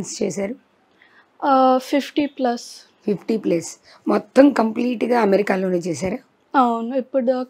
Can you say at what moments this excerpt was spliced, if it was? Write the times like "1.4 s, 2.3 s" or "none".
none